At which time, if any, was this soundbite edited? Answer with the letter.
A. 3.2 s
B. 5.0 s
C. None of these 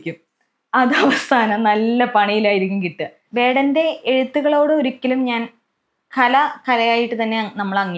A